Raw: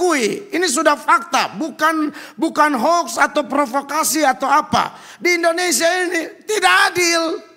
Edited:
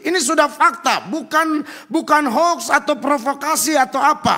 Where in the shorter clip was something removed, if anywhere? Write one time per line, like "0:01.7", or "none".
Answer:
none